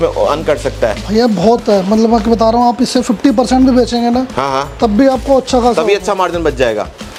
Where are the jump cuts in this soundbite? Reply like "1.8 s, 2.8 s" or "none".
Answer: none